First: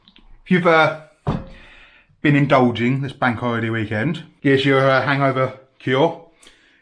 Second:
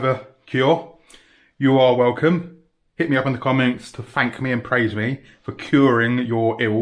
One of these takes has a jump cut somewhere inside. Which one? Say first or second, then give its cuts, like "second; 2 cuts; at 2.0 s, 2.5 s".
first; 1 cut; at 4.3 s